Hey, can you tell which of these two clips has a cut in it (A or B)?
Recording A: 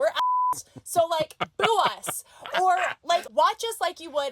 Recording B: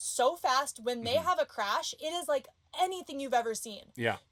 A